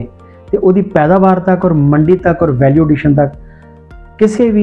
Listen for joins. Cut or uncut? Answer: uncut